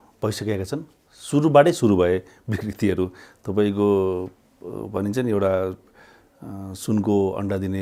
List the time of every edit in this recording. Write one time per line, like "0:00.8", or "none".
none